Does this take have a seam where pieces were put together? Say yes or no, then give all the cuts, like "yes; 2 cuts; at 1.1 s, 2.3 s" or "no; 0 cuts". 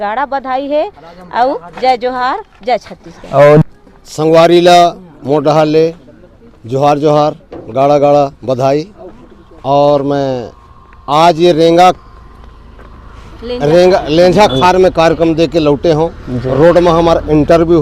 yes; 1 cut; at 3.6 s